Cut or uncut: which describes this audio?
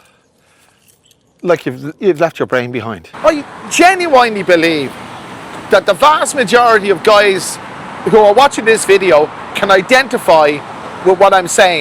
cut